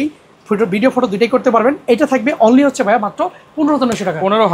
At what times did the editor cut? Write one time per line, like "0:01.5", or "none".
none